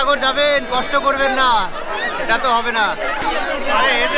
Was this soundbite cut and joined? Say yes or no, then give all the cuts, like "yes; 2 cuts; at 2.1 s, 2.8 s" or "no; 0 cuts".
yes; 1 cut; at 3.2 s